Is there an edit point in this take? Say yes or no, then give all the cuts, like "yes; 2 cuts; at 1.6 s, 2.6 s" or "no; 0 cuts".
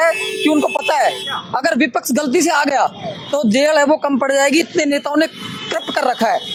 no; 0 cuts